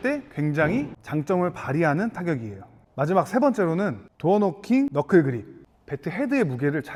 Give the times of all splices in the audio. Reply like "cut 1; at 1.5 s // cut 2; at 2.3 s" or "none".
none

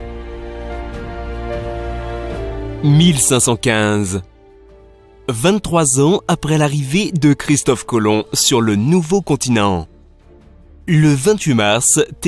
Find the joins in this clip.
cut 1; at 3.8 s

